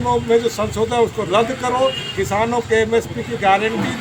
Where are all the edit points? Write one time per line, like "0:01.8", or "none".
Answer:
none